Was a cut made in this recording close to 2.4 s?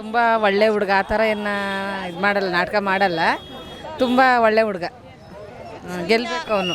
no; 0 cuts

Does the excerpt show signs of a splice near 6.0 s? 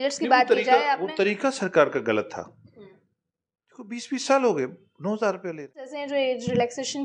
yes; 1 cut; at 6.0 s

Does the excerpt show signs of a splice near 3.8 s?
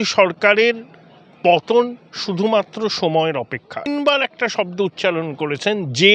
yes; 1 cut; at 3.8 s

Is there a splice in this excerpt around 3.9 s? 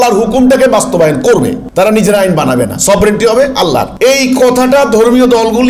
yes; 2 cuts; at 1.6 s, 3.9 s

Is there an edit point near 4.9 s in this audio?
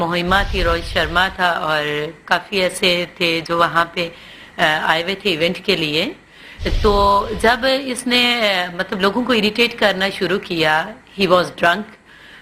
no; 1 cut; at 9.2 s

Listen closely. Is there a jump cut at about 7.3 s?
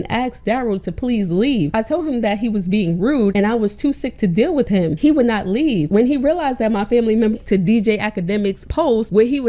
yes; 1 cut; at 7.3 s

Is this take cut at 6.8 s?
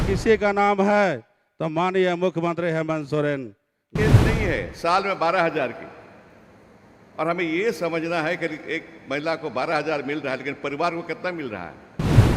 no; 1 cut; at 4.0 s

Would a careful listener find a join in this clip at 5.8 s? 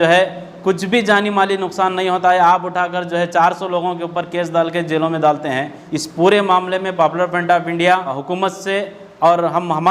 yes; 2 cuts; at 5.8 s, 8.2 s

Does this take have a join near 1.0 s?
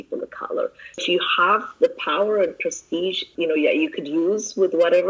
yes; 1 cut; at 1.0 s

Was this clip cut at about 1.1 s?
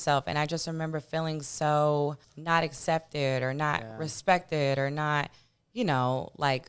no; 1 cut; at 2.3 s

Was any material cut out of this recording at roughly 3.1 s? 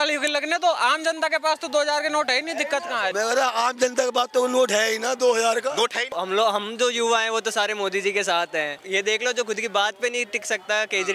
yes; 3 cuts; at 3.1 s, 6.1 s, 8.8 s

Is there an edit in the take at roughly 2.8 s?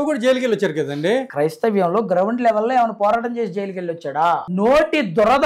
no; 2 cuts; at 1.3 s, 4.5 s

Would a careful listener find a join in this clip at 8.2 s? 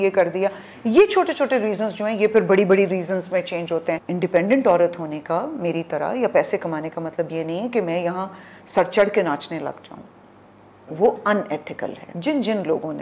no; 2 cuts; at 4.1 s, 12.1 s

